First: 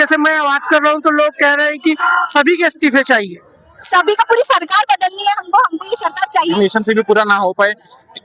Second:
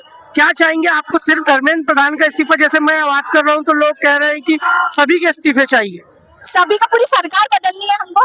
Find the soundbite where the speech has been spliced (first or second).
first